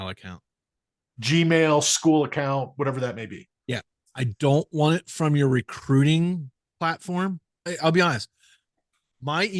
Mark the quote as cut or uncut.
cut